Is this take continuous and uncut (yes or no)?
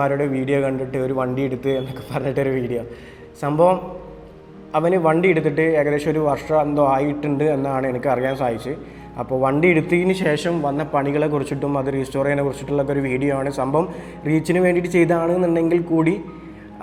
yes